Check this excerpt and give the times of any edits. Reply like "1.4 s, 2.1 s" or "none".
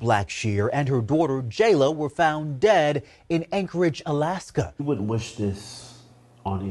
4.8 s